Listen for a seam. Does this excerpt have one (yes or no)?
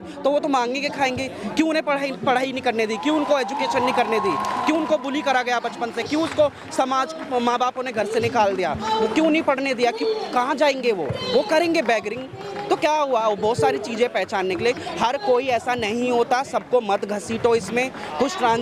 no